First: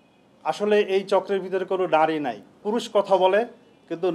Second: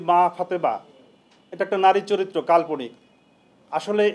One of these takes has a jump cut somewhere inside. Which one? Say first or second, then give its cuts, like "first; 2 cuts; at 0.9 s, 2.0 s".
first; 1 cut; at 2.6 s